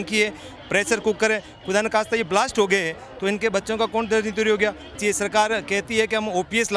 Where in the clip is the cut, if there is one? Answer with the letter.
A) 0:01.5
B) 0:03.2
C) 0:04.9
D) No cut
C